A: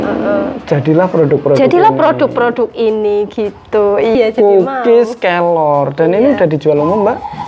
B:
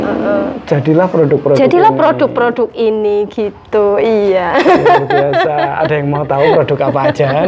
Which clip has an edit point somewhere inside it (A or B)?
A